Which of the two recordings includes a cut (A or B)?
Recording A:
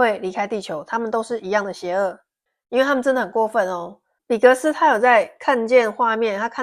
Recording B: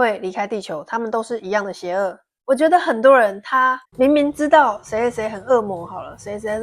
B